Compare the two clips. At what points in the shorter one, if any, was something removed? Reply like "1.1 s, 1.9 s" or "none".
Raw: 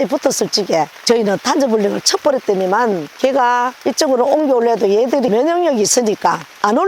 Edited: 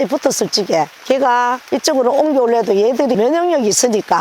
1.0 s